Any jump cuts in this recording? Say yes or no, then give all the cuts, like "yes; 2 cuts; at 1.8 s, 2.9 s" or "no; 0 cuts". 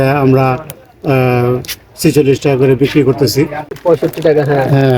yes; 1 cut; at 3.7 s